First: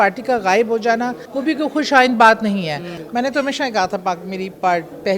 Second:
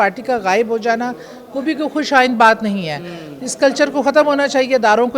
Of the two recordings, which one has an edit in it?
first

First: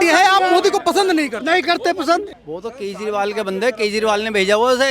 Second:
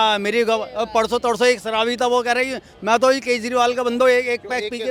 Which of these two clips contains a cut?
first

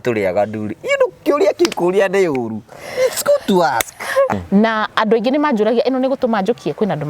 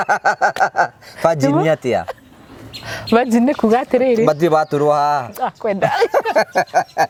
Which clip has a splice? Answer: first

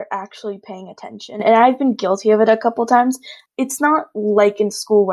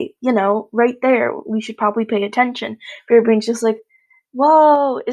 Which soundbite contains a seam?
first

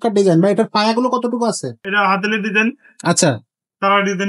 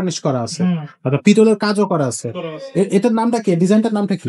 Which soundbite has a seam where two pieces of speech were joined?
first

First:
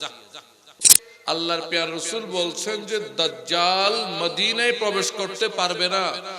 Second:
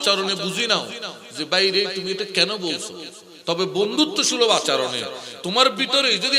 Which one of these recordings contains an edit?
first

